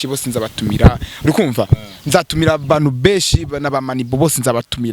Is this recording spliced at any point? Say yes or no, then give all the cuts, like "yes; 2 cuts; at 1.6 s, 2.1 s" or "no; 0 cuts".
no; 0 cuts